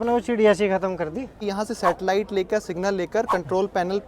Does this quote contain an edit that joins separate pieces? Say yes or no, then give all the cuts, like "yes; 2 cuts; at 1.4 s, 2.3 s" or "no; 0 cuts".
yes; 1 cut; at 1.4 s